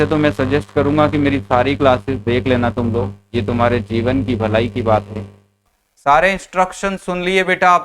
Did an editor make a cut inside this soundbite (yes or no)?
yes